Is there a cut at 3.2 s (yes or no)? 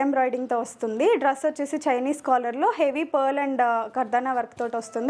no